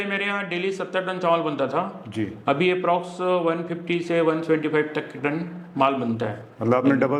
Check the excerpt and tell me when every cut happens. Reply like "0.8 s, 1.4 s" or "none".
none

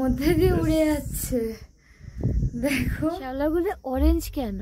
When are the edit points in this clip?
3.3 s

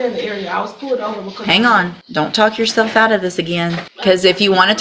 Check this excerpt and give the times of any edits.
2.0 s, 3.9 s

